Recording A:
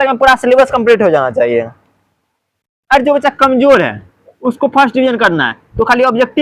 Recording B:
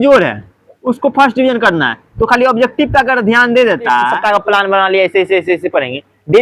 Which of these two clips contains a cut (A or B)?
B